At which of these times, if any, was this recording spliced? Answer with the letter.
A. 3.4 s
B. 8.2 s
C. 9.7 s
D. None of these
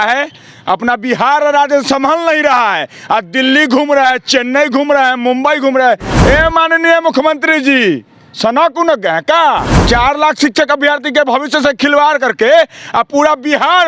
C